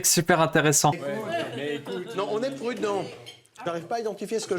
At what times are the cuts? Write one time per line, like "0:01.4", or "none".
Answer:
0:01.0